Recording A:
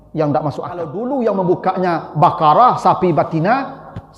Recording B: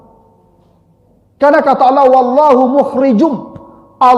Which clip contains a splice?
A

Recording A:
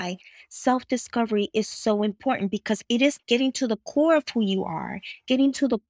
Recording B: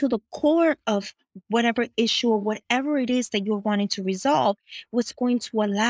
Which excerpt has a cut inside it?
A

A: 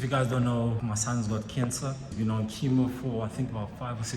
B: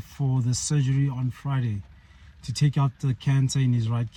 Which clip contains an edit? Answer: A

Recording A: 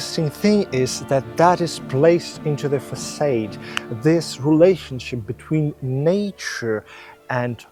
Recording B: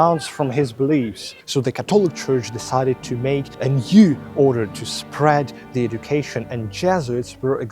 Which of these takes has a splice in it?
B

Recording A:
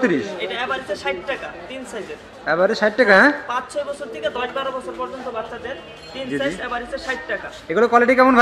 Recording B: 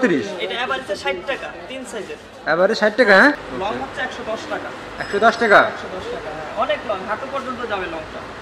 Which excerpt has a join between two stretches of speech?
B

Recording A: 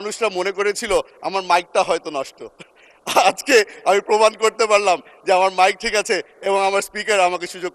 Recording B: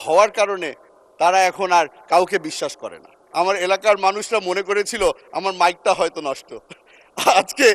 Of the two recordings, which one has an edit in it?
B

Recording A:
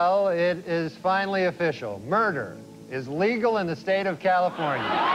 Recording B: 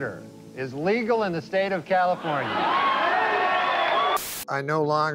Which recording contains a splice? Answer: B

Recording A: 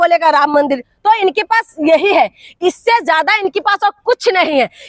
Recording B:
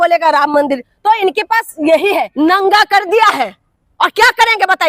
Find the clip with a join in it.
B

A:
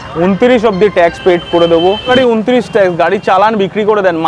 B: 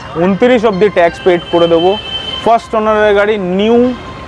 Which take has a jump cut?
A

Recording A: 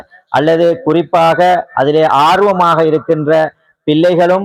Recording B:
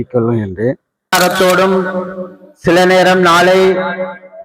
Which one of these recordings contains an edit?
B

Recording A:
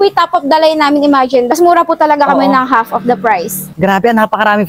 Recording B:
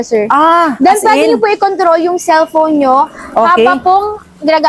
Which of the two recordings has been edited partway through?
A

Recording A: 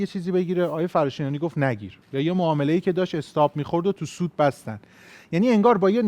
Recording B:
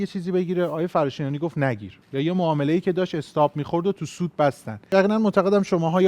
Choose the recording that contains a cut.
B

